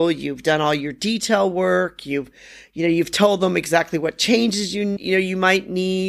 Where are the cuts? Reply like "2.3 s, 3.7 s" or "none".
5.0 s